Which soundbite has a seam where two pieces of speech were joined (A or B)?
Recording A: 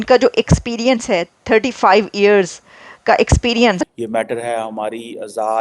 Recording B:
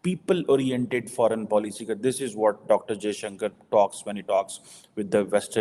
A